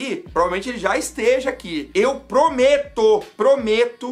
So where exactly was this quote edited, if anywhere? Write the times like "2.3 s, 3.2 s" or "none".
none